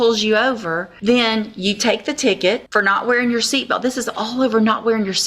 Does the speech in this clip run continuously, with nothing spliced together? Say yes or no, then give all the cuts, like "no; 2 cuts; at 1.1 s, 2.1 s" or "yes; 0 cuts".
no; 2 cuts; at 0.9 s, 2.7 s